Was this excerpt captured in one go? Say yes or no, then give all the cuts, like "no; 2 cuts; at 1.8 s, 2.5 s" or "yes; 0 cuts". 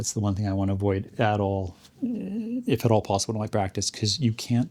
yes; 0 cuts